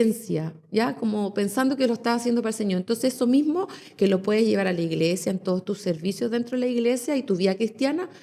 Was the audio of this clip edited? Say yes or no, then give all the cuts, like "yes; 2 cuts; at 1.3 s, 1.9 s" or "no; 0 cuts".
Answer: no; 0 cuts